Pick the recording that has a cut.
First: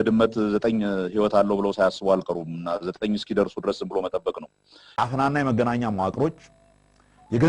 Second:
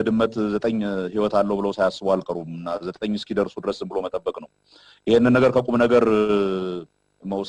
first; 1 cut; at 5.0 s

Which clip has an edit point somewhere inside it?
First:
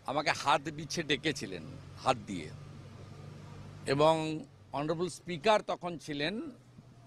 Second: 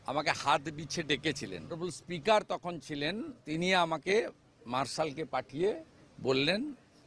second; 2 cuts; at 1.8 s, 3.3 s

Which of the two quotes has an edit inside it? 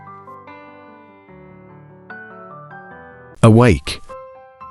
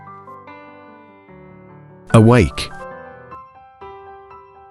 first; 2 cuts; at 2.1 s, 3.4 s

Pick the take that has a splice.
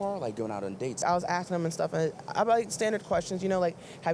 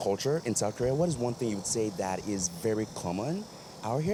first; 1 cut; at 1.0 s

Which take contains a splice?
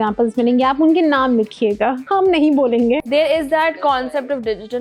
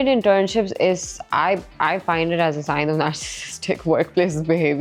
first; 2 cuts; at 2.0 s, 3.0 s

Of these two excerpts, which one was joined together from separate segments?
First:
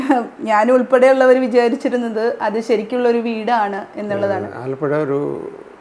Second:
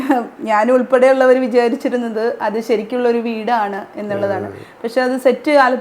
first; 1 cut; at 4.6 s

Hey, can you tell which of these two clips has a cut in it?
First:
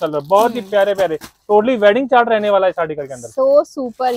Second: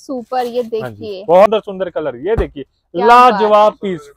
second; 1 cut; at 1.5 s

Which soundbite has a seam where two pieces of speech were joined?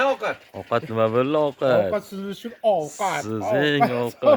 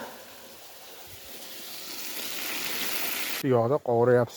second; 1 cut; at 3.4 s

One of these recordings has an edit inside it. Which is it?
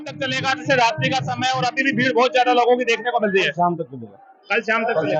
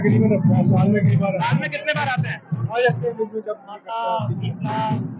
second; 1 cut; at 3.9 s

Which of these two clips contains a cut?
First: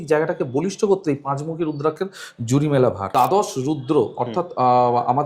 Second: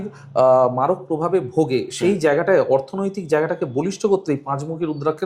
first; 1 cut; at 3.0 s

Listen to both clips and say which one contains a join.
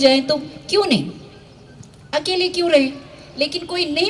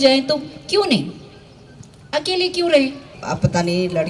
second; 1 cut; at 3.1 s

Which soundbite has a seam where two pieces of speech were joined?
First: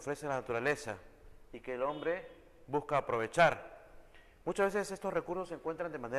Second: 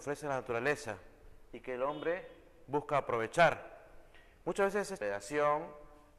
first; 1 cut; at 4.9 s

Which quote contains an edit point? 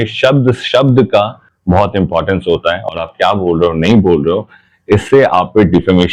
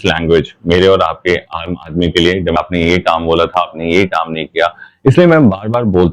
second; 1 cut; at 2.6 s

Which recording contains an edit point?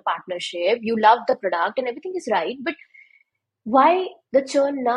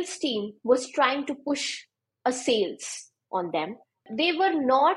second; 1 cut; at 4.0 s

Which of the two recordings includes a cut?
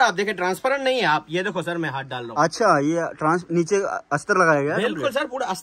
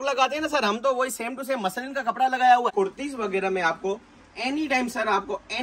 second; 1 cut; at 2.7 s

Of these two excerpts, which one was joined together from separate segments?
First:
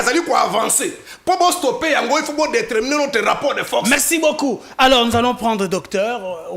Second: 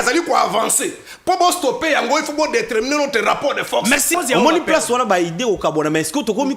second; 1 cut; at 4.1 s

